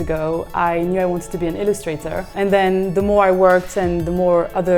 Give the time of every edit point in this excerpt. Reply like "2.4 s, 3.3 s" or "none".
2.3 s